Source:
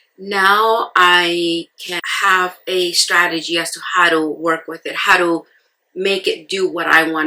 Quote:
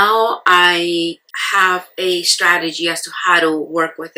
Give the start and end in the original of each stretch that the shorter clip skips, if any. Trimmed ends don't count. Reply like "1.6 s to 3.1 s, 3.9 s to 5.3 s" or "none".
1.8 s to 2.0 s